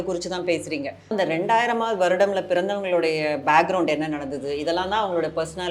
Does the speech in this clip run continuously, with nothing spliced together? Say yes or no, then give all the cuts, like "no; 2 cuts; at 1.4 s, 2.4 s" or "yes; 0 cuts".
no; 1 cut; at 1.1 s